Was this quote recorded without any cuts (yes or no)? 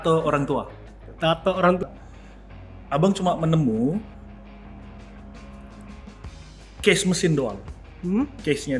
no